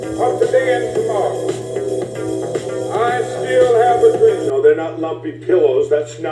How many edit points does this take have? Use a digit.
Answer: 1